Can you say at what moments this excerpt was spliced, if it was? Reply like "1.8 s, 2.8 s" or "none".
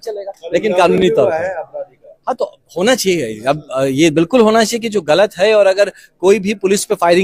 none